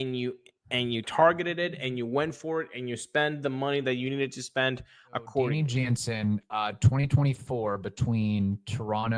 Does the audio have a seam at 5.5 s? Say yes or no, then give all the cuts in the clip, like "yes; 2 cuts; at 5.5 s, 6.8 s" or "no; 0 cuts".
yes; 1 cut; at 5.5 s